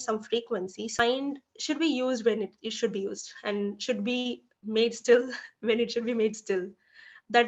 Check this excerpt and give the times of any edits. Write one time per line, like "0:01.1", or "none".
0:01.0